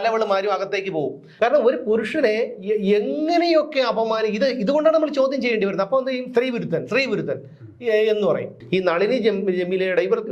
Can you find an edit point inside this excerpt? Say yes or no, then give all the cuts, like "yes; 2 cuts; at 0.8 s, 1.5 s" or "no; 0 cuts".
yes; 2 cuts; at 1.2 s, 8.6 s